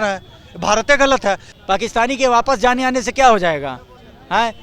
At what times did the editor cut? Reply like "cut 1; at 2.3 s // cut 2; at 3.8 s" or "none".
cut 1; at 1.1 s